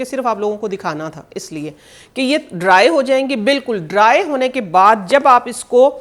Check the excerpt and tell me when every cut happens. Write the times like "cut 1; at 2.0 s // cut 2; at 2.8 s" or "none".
none